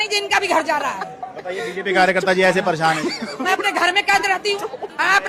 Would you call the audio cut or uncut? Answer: cut